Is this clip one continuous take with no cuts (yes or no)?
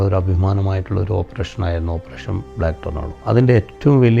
no